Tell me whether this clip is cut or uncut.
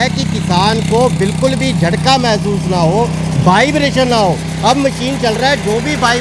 uncut